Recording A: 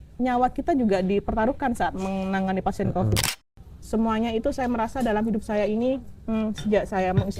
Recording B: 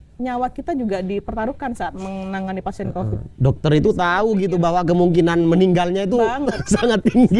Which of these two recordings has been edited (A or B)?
A